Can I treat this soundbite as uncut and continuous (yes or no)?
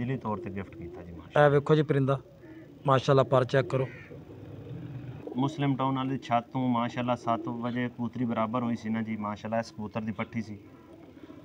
no